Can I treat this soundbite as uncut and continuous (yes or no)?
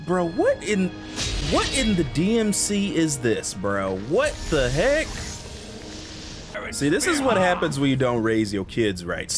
no